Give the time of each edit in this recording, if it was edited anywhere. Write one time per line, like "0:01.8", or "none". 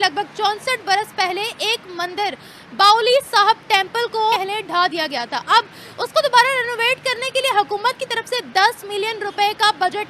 0:04.4